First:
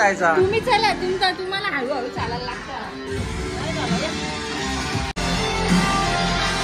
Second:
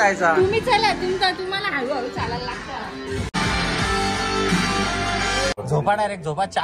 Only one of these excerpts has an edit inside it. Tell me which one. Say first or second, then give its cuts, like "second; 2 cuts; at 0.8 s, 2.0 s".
second; 2 cuts; at 3.3 s, 5.5 s